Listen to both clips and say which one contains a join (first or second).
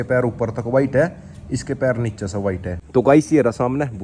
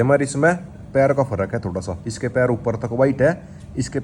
first